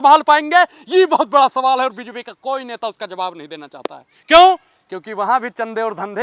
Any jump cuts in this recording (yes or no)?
no